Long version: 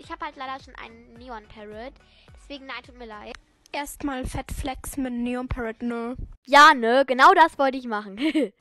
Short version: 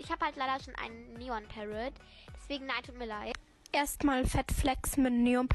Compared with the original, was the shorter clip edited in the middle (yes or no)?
no